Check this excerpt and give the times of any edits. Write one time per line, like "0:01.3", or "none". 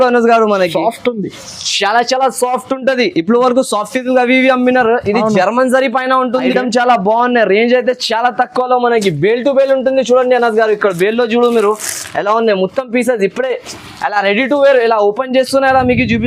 0:06.5